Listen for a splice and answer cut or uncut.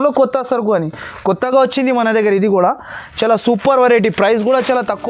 uncut